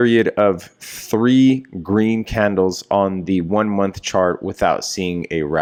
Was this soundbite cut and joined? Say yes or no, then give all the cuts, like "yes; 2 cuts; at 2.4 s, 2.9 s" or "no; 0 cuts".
no; 0 cuts